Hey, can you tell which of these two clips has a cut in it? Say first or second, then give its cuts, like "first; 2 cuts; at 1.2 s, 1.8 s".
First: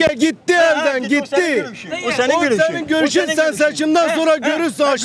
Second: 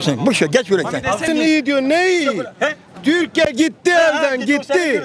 second; 1 cut; at 1.2 s